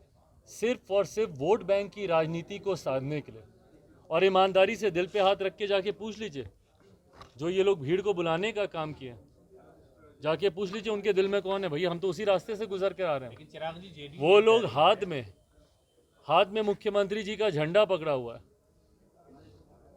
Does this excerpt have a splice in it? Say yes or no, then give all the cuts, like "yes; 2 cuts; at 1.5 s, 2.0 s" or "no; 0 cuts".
no; 0 cuts